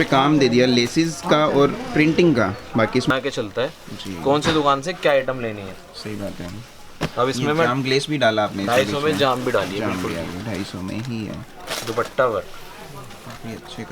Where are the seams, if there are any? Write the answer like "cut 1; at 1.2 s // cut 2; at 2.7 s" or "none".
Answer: cut 1; at 3.1 s